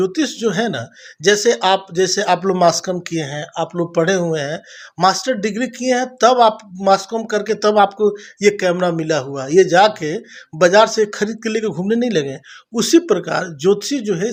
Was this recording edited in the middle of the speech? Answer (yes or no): no